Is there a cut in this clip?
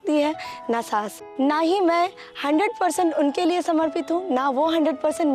yes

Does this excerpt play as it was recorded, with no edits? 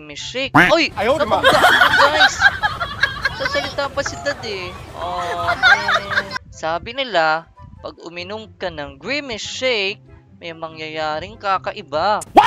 no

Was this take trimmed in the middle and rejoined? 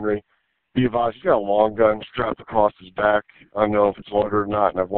no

